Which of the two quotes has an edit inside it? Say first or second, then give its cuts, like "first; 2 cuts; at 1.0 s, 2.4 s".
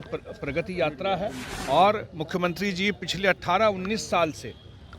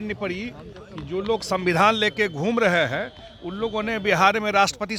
first; 1 cut; at 1.5 s